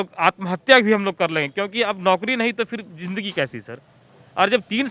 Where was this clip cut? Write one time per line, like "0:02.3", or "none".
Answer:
none